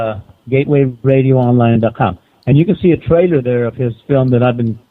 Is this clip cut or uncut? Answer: cut